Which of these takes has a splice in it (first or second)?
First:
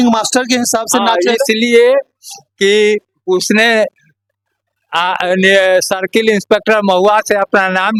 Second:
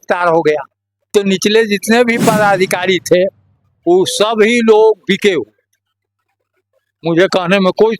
second